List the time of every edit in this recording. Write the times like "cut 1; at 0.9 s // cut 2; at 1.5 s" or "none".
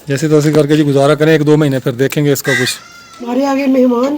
cut 1; at 3.3 s